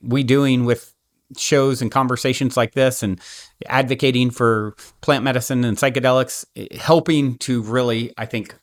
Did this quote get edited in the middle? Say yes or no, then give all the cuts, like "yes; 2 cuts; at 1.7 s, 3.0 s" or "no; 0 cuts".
no; 0 cuts